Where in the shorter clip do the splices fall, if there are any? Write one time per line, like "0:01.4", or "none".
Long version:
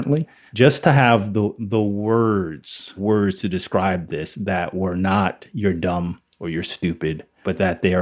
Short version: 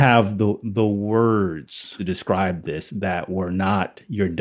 0:02.0

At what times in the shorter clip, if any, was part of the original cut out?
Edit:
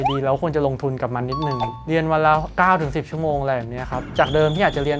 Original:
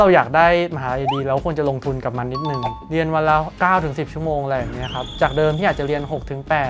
none

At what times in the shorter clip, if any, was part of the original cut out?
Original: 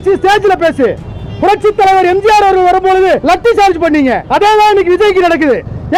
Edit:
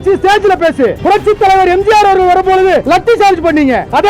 0:01.0

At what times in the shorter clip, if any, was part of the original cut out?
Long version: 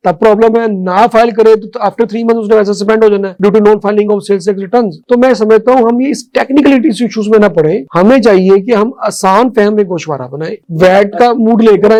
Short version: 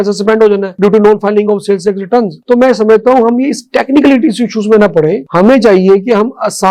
none

